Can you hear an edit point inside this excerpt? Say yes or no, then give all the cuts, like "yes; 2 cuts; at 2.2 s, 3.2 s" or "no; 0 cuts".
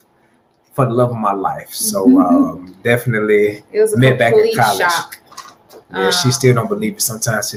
no; 0 cuts